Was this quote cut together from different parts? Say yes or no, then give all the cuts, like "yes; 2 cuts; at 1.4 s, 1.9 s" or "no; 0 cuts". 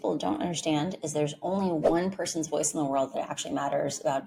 no; 0 cuts